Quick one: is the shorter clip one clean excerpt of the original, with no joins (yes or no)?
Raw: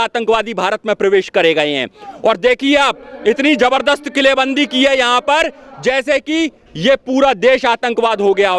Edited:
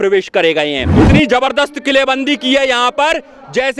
no